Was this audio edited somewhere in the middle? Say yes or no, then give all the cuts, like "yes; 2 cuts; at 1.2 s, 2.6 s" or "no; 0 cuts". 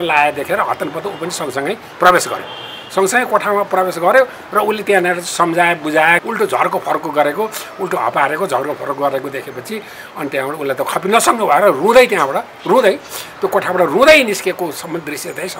yes; 1 cut; at 6.2 s